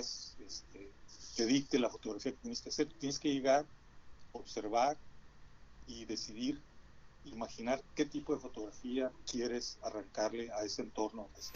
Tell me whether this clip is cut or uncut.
uncut